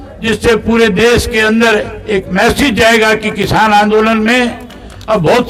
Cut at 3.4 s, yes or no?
no